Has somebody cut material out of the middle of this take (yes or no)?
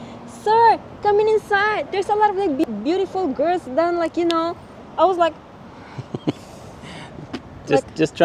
no